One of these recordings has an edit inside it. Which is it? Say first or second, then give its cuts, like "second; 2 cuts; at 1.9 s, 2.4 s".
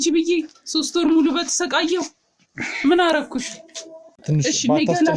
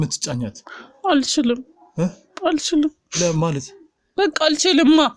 first; 1 cut; at 4.2 s